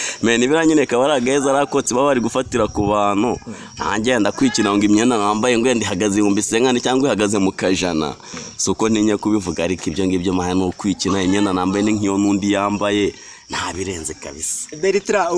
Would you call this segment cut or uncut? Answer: uncut